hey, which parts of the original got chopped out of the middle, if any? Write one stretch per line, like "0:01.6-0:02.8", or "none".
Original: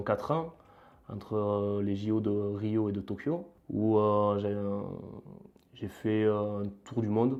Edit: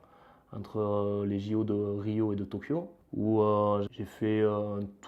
0:04.4-0:05.7

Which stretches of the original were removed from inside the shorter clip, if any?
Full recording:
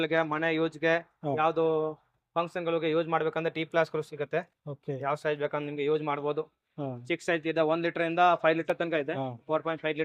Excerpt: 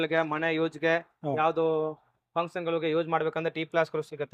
none

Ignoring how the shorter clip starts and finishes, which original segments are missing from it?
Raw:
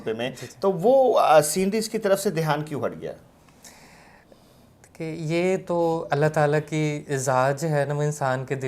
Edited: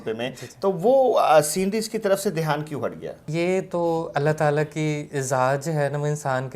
0:03.2-0:05.2

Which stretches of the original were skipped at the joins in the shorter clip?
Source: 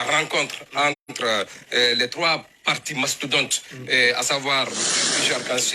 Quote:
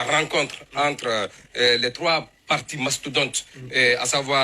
0:01.0-0:01.2

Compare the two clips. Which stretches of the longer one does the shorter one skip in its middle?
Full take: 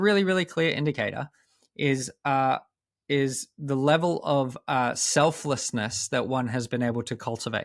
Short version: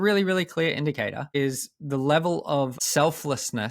0:01.2-0:03.0
0:04.6-0:05.0

